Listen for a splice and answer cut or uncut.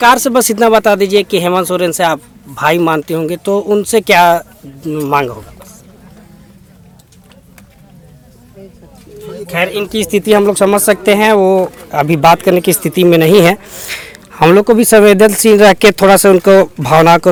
uncut